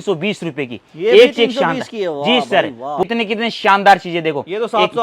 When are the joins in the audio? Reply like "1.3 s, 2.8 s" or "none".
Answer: 3.0 s